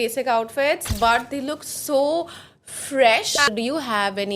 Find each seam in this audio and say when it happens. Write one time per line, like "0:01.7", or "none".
0:03.5